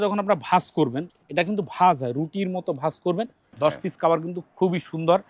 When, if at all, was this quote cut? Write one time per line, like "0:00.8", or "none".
0:01.1
0:03.5